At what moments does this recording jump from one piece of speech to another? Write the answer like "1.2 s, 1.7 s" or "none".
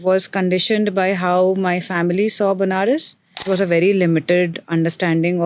3.4 s